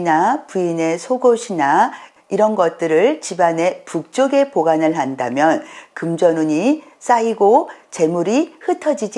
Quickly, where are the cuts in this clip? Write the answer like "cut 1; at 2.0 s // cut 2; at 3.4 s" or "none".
cut 1; at 2.1 s